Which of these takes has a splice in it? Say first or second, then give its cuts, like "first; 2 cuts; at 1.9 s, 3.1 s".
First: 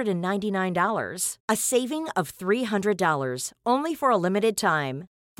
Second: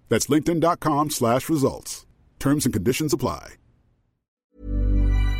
second; 1 cut; at 4.4 s